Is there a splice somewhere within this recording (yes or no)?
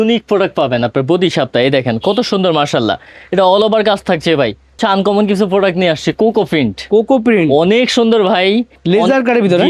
yes